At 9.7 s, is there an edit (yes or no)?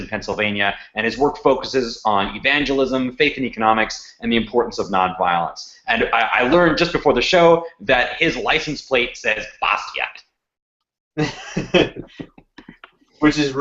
yes